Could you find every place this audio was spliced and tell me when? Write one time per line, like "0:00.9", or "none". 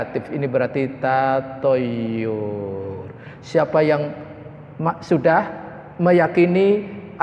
none